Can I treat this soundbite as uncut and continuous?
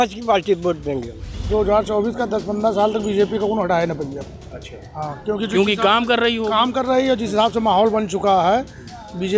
no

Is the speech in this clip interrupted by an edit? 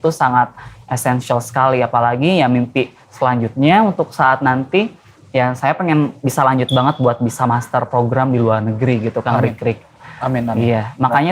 no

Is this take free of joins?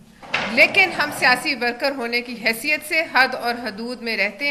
yes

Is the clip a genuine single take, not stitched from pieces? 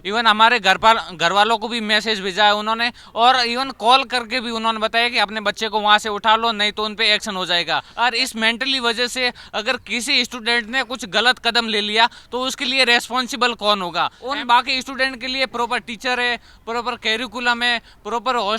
no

